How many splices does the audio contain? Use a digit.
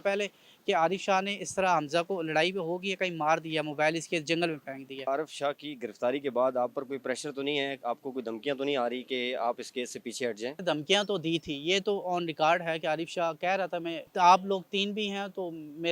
3